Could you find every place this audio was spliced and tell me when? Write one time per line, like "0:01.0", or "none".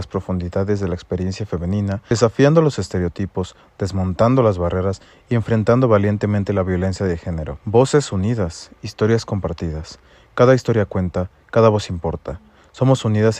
0:02.1
0:07.3

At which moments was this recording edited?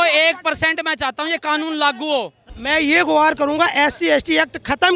0:02.5

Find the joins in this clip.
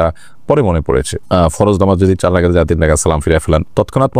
none

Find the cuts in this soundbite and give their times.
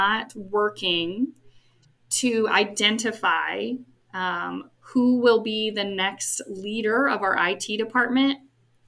none

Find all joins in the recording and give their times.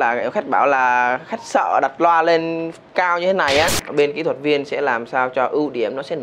0:03.8

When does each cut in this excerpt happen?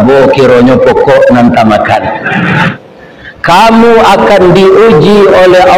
0:02.7

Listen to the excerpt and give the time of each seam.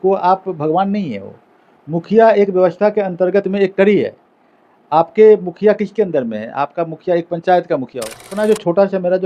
0:08.3

